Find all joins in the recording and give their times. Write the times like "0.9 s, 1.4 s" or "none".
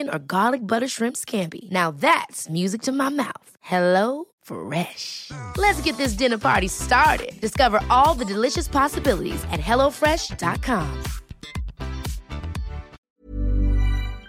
13.1 s